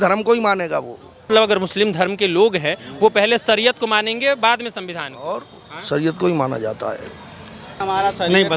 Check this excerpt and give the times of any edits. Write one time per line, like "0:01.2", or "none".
0:01.3
0:07.8